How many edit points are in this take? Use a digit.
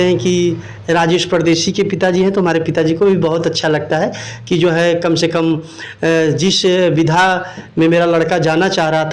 0